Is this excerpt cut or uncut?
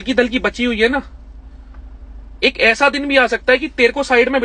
uncut